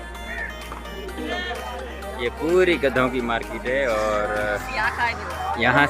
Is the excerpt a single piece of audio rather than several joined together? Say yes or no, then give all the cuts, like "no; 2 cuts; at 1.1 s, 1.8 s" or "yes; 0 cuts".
no; 1 cut; at 2.0 s